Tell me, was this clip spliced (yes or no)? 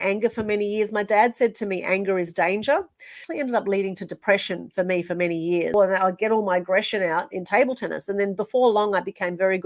yes